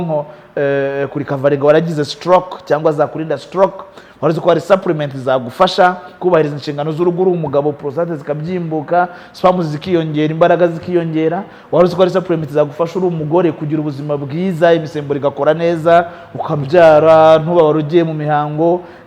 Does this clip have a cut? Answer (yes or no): no